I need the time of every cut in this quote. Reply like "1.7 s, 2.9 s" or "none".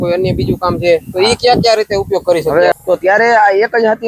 2.7 s